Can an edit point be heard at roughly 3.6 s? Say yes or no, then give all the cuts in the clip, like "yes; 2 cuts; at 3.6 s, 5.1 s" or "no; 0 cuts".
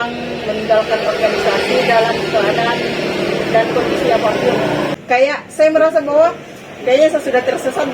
no; 1 cut; at 4.9 s